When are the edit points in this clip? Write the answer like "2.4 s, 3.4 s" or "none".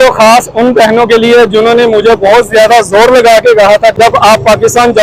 none